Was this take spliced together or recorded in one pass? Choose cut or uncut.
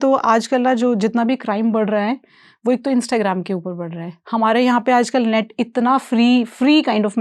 uncut